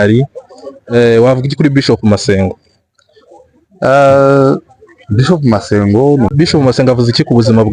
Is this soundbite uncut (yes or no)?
no